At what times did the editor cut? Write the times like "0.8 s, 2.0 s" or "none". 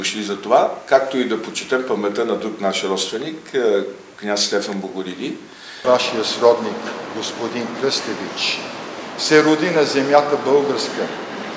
5.8 s

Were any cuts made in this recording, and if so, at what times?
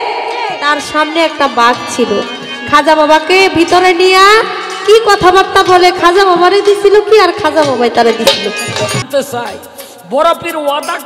9.0 s

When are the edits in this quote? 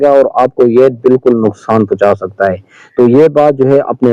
none

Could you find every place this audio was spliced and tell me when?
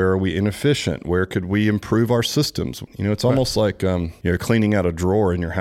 2.9 s, 4.1 s

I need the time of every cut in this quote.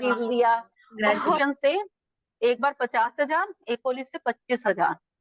1.4 s

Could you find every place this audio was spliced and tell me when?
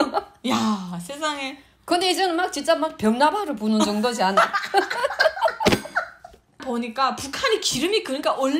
6.6 s

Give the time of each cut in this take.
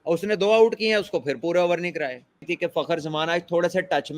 2.4 s

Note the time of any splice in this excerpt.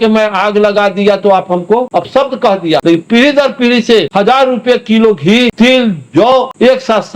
1.9 s, 2.8 s, 4.1 s, 5.5 s, 6.4 s

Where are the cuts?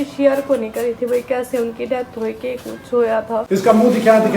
3.4 s

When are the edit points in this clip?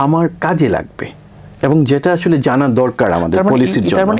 none

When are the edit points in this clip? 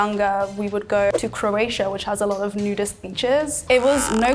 1.1 s

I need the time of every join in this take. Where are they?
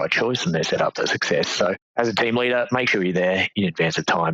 1.8 s

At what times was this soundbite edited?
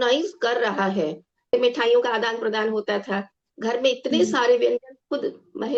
1.5 s

